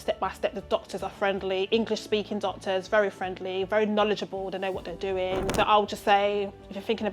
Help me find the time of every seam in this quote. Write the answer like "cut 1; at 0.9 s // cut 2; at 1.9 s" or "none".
cut 1; at 5.5 s